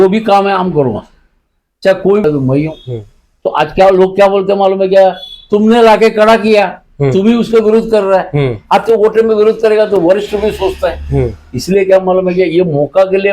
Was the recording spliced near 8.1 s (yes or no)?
no